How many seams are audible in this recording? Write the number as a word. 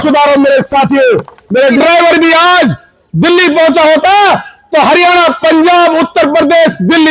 one